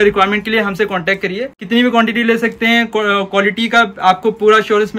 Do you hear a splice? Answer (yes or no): yes